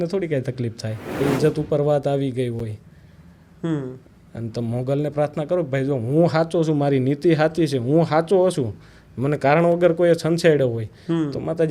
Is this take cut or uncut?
cut